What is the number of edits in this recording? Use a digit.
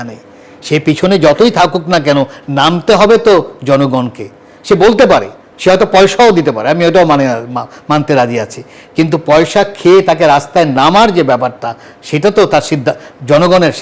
1